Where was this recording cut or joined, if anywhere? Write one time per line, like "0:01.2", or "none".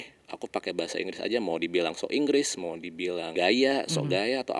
0:03.3